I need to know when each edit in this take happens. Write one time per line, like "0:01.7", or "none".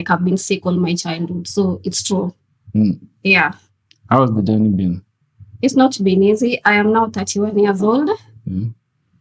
none